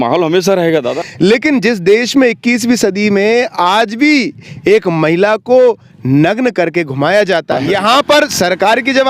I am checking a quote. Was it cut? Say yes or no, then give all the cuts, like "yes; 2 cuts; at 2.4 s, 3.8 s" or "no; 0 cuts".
yes; 2 cuts; at 1.0 s, 7.6 s